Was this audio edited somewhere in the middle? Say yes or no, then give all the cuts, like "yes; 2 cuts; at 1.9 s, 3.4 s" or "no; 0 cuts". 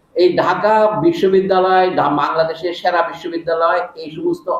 no; 0 cuts